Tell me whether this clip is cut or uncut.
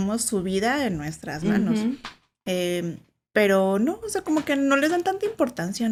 uncut